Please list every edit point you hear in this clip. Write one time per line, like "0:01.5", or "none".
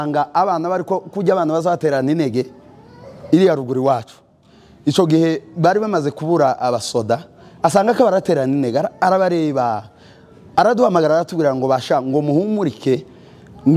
none